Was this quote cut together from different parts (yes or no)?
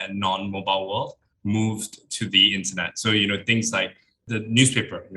yes